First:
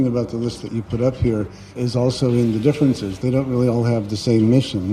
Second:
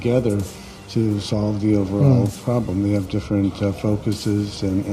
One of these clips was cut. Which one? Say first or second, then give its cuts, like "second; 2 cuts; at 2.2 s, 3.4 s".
first; 1 cut; at 1.8 s